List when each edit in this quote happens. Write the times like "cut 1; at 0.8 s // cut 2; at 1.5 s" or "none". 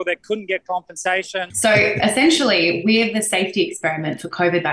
cut 1; at 1.5 s

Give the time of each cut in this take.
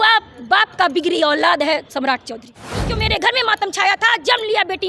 cut 1; at 2.9 s

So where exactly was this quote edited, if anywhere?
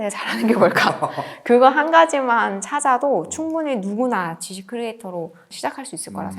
cut 1; at 5.4 s

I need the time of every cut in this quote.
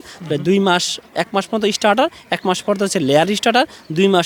none

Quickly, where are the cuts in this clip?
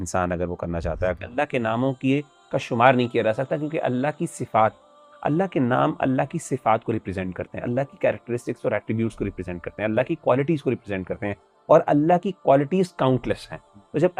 cut 1; at 1.2 s

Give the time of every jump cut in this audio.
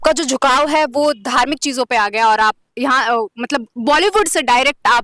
none

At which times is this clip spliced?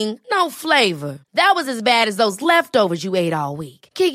none

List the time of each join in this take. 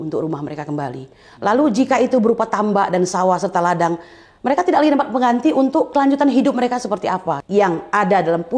cut 1; at 7.4 s

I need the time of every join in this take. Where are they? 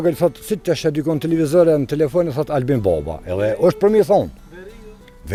none

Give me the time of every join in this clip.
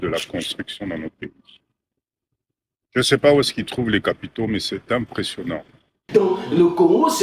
cut 1; at 6.0 s

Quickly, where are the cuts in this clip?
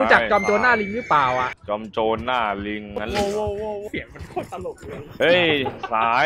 cut 1; at 1.6 s

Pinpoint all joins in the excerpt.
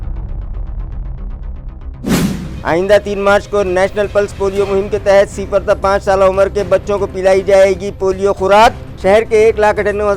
cut 1; at 2.5 s

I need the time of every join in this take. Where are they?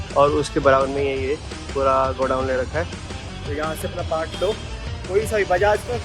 none

